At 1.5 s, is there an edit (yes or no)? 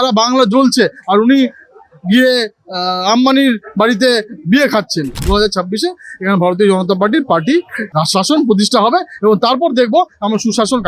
no